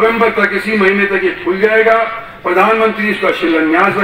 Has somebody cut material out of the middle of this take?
no; 0 cuts

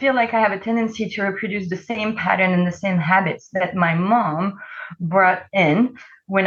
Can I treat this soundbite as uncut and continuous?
yes; 0 cuts

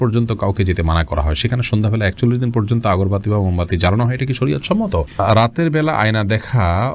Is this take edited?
yes; 1 cut; at 5.1 s

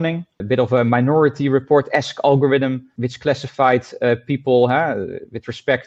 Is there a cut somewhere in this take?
no; 0 cuts

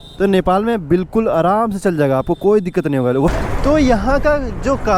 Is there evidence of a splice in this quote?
yes; 1 cut; at 3.3 s

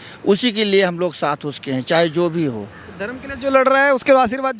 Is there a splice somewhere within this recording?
no; 0 cuts

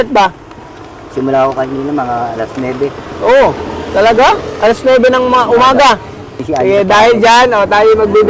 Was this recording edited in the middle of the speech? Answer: yes; 1 cut; at 6.3 s

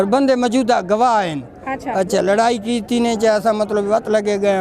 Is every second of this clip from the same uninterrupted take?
yes; 0 cuts

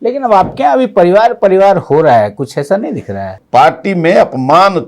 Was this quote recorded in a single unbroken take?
no; 1 cut; at 3.4 s

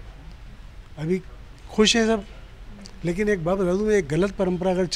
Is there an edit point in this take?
no; 0 cuts

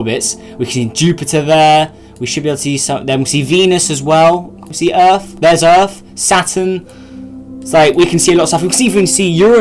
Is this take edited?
yes; 1 cut; at 8.5 s

